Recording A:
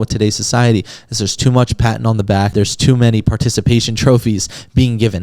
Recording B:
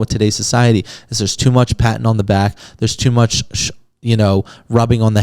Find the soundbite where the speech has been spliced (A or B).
A